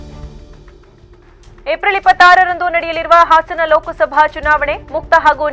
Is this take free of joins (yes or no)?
yes